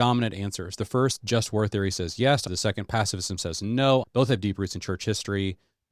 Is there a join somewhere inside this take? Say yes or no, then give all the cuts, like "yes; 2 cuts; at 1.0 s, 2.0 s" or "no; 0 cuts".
yes; 2 cuts; at 2.5 s, 4.1 s